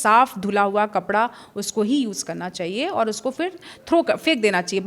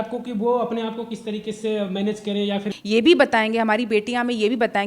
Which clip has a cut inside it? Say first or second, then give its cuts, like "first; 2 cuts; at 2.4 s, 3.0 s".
second; 1 cut; at 2.7 s